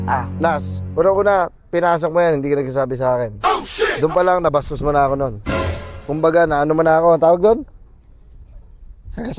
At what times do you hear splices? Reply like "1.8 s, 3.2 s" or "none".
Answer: none